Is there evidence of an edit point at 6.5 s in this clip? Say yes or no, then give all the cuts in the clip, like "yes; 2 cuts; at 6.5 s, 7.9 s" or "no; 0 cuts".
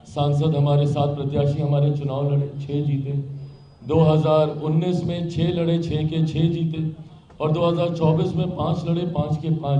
no; 0 cuts